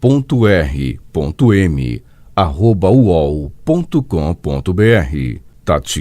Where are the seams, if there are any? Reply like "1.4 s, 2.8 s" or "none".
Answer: 5.0 s